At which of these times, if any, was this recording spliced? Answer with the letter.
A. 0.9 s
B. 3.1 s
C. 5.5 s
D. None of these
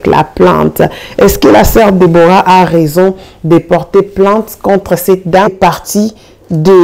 C